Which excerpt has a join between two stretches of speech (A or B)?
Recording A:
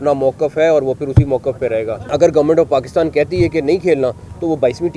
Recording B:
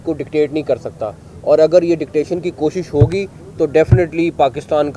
A